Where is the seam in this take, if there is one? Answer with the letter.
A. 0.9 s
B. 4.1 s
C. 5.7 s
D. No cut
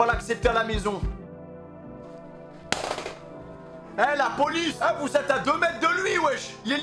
D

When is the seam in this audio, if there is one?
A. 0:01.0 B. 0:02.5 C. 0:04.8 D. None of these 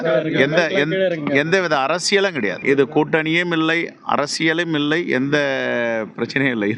B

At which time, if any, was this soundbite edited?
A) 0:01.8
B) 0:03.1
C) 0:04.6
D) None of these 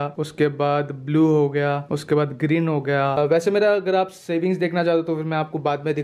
B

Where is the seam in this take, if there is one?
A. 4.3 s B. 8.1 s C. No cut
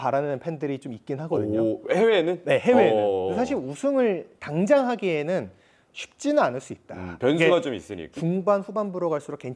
B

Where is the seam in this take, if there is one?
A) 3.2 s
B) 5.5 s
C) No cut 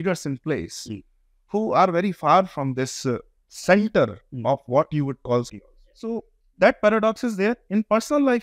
B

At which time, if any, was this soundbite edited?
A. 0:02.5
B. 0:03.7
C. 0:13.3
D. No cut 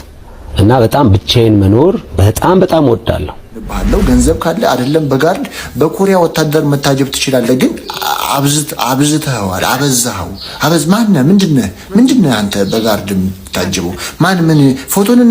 B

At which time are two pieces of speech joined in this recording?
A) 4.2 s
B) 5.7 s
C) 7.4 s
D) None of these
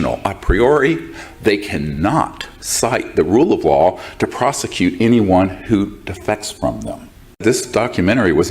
C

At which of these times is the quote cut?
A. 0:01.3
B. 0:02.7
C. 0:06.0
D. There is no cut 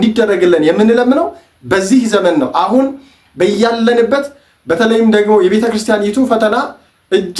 D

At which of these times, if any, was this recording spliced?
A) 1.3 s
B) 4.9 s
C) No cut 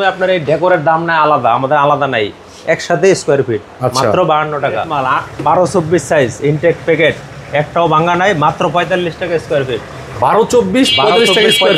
B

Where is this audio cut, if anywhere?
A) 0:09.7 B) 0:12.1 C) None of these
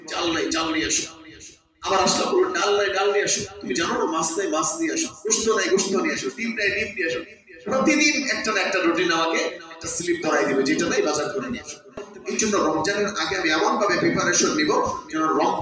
B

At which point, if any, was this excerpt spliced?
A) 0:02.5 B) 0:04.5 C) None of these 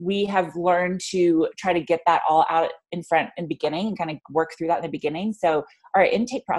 A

